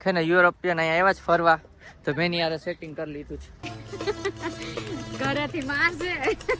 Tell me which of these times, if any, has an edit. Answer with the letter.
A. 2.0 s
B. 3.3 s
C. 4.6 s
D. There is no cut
D